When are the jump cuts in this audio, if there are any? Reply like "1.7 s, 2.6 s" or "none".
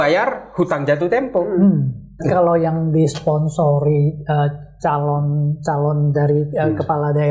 2.2 s